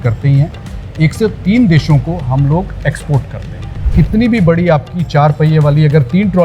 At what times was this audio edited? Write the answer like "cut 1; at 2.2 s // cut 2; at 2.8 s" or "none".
cut 1; at 3.9 s